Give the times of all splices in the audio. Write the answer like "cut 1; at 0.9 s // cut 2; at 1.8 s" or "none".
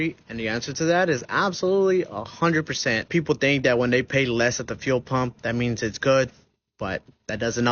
cut 1; at 3.1 s